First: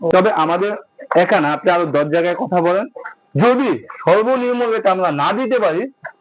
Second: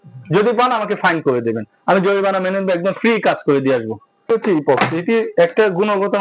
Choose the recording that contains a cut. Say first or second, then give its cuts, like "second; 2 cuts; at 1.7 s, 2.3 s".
second; 1 cut; at 4.3 s